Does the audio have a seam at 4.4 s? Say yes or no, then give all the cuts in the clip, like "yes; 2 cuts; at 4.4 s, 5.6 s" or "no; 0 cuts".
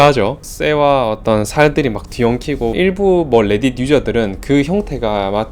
no; 1 cut; at 2.7 s